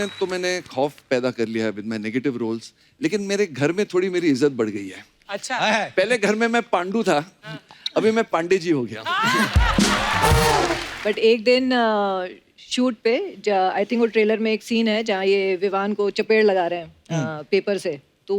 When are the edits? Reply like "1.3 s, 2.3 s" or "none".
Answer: 10.9 s